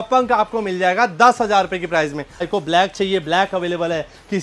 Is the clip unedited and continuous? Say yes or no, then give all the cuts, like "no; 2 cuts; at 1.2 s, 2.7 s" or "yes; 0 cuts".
no; 1 cut; at 2.5 s